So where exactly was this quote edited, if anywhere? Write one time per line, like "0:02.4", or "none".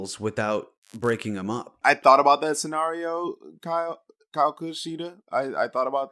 0:01.7

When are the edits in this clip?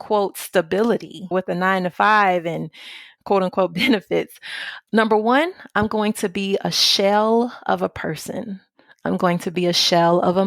0:03.0

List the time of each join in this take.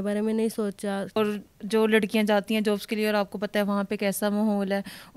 0:01.1

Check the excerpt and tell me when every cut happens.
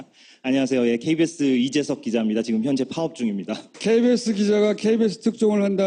0:03.6

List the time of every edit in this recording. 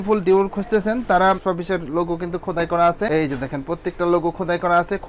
0:01.4

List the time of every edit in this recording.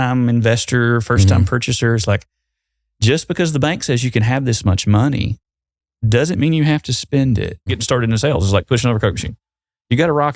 0:07.7

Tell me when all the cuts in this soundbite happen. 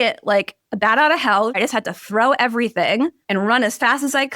0:01.6
0:03.2

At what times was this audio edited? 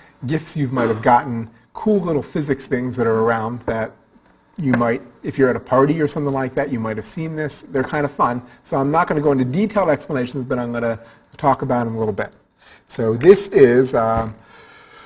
0:07.9

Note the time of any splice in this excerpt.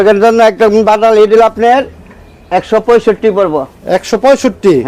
none

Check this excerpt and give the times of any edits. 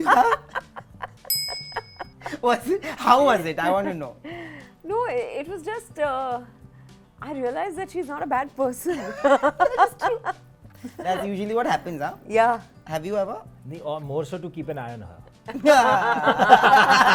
none

